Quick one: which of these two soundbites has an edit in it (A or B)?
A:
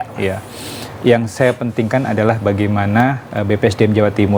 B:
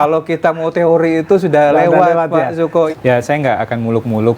B